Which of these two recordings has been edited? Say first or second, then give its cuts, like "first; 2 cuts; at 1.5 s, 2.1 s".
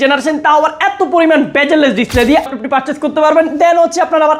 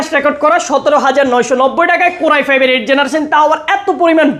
first; 1 cut; at 2.5 s